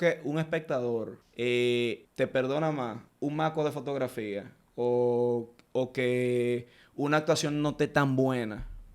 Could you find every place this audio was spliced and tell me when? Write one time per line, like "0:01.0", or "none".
0:01.2
0:02.1
0:03.0